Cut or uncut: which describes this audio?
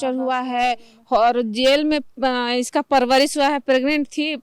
uncut